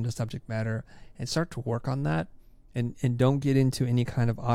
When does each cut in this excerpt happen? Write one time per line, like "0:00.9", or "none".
none